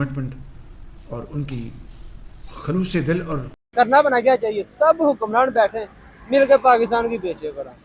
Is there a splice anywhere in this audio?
yes; 1 cut; at 3.7 s

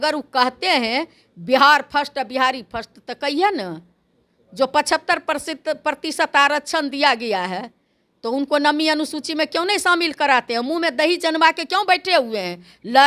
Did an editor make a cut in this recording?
no; 0 cuts

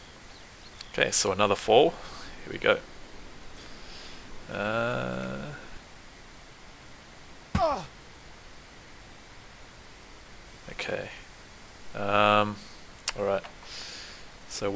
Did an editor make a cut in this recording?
no; 0 cuts

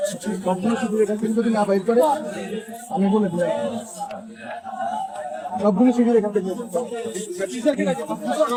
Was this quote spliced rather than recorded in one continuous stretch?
no; 0 cuts

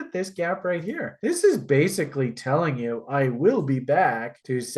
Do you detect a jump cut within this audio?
no; 0 cuts

